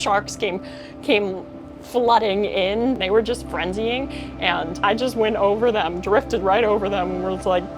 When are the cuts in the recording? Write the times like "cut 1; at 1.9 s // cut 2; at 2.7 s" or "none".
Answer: cut 1; at 3.0 s // cut 2; at 4.8 s

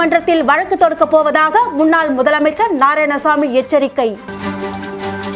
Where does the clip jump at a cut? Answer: none

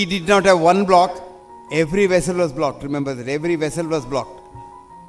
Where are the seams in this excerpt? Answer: none

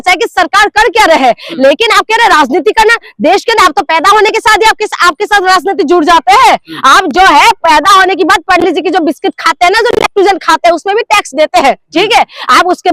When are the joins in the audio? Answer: none

